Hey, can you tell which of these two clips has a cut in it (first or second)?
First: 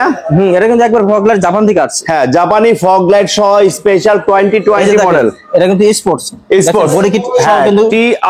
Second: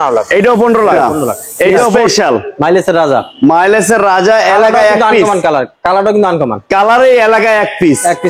second